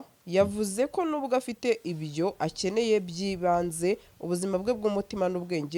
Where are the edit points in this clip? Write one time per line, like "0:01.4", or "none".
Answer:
none